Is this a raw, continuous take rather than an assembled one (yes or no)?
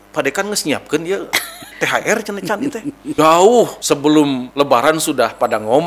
no